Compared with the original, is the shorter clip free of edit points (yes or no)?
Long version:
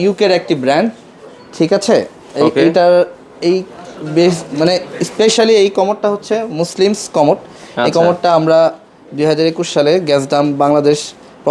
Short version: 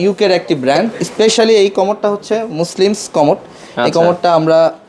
no